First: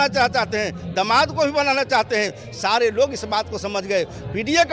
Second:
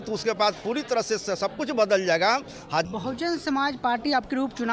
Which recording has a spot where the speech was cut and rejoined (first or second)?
second